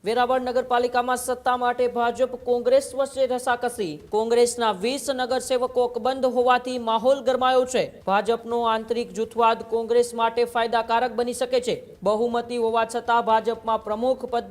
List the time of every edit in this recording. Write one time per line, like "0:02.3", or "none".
0:03.9
0:08.0
0:11.9